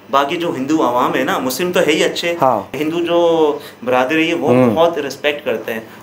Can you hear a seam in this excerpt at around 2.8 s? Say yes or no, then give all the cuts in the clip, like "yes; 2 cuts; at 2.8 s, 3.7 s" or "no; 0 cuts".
yes; 1 cut; at 2.8 s